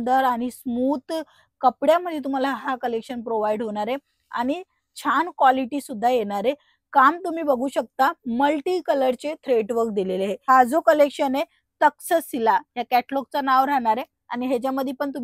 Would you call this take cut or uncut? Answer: cut